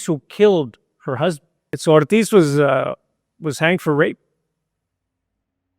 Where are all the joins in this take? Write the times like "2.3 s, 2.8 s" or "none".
1.7 s